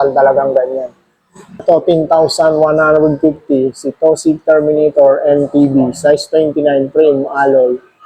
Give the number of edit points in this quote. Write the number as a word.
one